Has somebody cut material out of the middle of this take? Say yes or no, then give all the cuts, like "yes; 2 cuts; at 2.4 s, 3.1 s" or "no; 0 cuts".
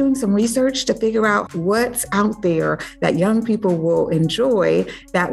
yes; 1 cut; at 1.5 s